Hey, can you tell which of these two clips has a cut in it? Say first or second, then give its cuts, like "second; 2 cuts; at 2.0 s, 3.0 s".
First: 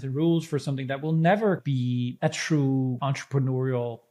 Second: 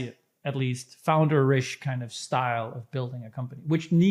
first; 2 cuts; at 1.8 s, 3.0 s